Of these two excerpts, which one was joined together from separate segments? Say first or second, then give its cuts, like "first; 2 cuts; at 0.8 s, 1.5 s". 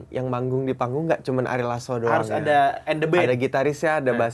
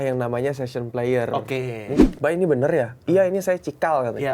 second; 1 cut; at 2.0 s